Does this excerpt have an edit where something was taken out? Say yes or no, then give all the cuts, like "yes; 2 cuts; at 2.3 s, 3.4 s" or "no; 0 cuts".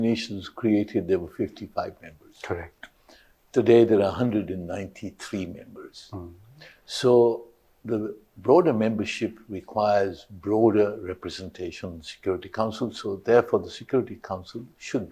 no; 0 cuts